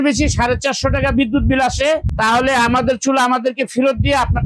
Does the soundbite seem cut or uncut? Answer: cut